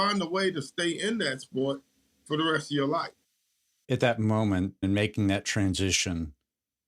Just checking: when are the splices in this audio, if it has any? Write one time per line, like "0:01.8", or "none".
0:03.2